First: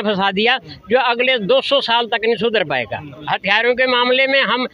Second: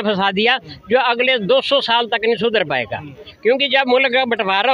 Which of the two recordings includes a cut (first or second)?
first